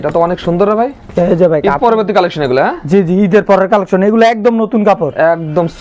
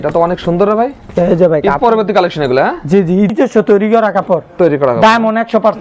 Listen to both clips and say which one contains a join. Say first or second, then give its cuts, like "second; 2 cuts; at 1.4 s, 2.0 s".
second; 1 cut; at 3.3 s